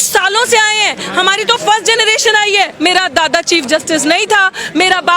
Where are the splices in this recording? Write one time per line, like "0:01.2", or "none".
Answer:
0:02.7